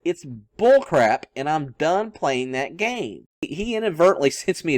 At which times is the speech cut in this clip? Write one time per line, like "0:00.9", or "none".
0:03.4